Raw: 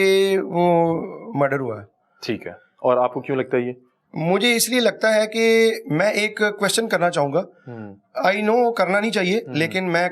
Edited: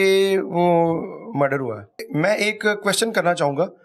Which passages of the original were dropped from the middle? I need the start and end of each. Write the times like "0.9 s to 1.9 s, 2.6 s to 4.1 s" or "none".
2.1 s to 5.8 s